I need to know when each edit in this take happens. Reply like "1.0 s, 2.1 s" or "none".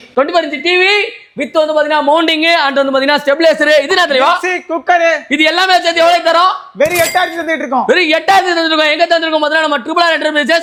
none